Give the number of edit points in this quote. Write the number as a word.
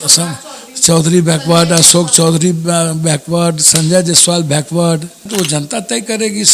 one